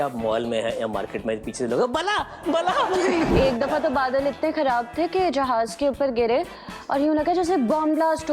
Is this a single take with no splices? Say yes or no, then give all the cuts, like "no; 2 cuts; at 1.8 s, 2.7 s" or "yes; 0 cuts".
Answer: no; 1 cut; at 3.3 s